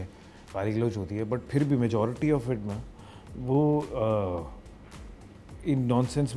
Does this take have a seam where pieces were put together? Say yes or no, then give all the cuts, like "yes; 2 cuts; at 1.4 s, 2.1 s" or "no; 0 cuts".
no; 0 cuts